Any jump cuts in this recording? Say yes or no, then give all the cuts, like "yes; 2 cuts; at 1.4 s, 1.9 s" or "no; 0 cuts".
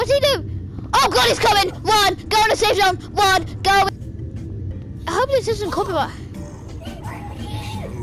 yes; 1 cut; at 3.9 s